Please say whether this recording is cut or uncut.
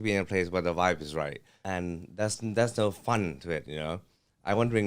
cut